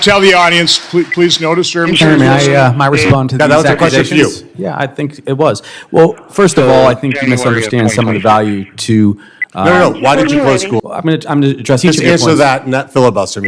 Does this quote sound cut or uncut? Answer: cut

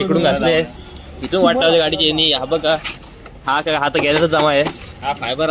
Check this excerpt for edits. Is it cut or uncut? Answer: uncut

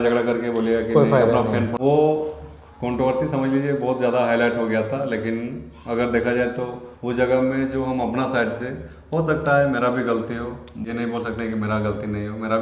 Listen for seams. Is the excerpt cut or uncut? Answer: cut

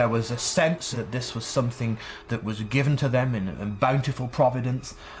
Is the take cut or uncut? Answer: cut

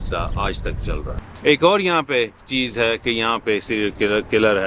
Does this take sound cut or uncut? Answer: cut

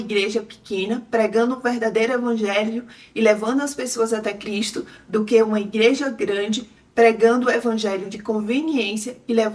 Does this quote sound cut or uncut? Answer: uncut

